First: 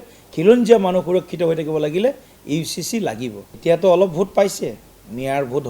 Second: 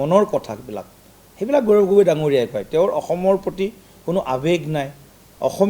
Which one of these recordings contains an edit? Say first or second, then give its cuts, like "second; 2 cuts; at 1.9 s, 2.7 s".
first; 1 cut; at 3.6 s